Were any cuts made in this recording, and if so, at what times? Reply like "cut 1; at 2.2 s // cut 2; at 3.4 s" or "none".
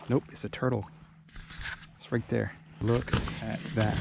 cut 1; at 2.7 s